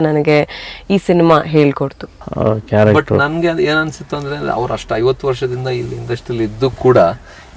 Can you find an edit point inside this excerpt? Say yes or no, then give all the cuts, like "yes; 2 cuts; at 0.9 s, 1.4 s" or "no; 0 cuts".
yes; 1 cut; at 2.2 s